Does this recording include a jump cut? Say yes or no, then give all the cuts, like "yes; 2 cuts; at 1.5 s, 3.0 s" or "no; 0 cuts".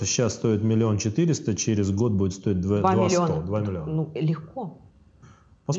no; 0 cuts